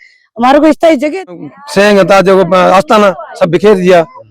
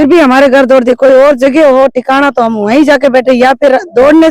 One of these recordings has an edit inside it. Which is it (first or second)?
first